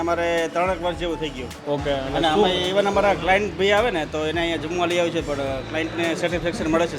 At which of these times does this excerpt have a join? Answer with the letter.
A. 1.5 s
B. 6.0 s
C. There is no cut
A